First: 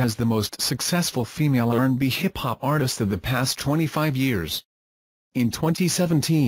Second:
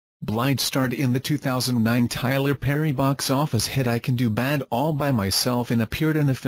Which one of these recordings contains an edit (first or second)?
second